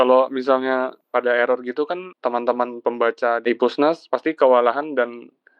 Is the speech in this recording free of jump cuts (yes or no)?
no